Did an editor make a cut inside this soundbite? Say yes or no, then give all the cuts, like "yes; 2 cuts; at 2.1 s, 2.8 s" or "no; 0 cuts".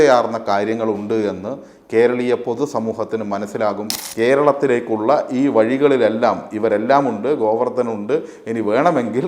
yes; 1 cut; at 4.0 s